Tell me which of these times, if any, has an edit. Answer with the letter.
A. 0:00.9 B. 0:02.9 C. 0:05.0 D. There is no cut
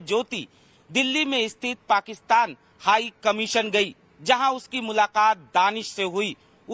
A